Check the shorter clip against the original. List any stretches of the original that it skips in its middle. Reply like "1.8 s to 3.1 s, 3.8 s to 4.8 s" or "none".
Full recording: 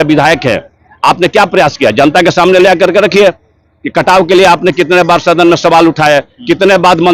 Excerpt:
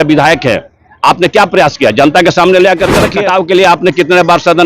3.1 s to 3.9 s